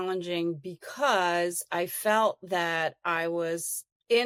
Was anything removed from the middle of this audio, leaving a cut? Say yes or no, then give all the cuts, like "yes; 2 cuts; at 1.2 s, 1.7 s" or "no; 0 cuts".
no; 0 cuts